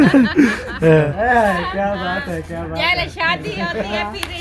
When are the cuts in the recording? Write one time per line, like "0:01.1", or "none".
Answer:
0:01.1